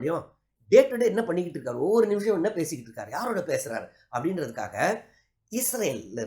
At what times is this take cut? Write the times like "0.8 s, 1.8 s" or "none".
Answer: none